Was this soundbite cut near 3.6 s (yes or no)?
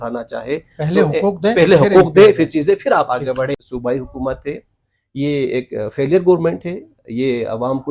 yes